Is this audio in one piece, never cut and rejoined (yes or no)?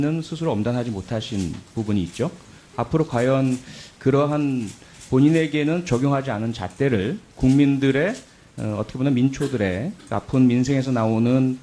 no